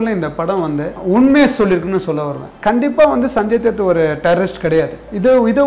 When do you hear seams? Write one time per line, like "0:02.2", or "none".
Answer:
0:01.0
0:02.5